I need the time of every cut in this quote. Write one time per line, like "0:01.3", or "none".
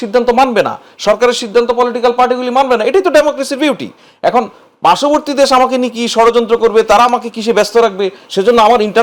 none